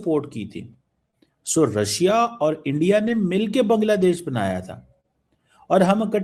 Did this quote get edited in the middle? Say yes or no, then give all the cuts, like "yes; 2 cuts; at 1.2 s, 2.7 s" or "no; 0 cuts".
no; 0 cuts